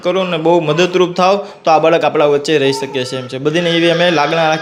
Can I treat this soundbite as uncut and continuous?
yes; 0 cuts

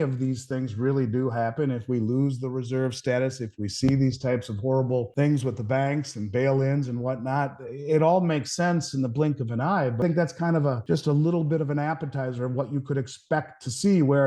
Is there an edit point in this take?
yes; 3 cuts; at 5.1 s, 10.0 s, 10.8 s

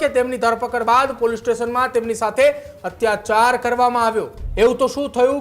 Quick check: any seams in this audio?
yes; 1 cut; at 4.4 s

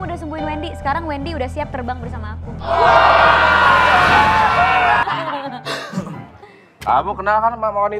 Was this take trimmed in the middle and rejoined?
yes; 1 cut; at 5.0 s

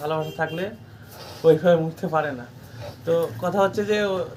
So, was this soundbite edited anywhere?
no; 0 cuts

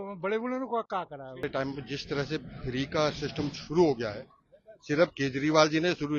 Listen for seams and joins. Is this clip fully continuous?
no; 1 cut; at 1.5 s

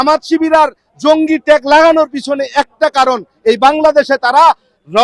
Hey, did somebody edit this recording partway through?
no; 0 cuts

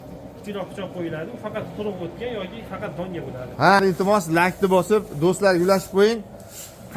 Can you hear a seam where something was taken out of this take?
yes; 1 cut; at 3.8 s

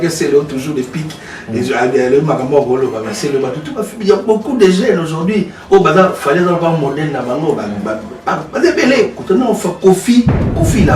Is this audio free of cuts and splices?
no; 1 cut; at 9.2 s

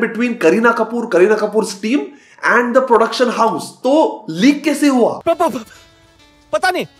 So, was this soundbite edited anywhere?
no; 0 cuts

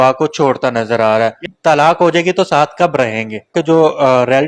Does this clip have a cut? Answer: yes; 2 cuts; at 1.4 s, 3.5 s

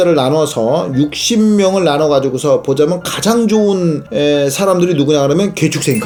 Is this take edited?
no; 0 cuts

